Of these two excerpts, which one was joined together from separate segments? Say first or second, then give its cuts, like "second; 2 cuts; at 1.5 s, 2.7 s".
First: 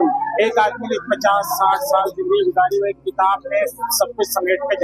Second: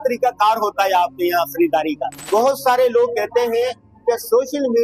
second; 1 cut; at 2.1 s